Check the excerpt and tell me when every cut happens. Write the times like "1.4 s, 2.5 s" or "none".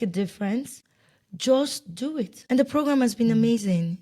2.3 s